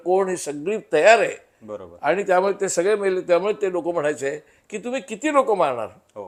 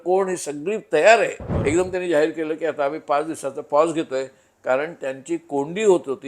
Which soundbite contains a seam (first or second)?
second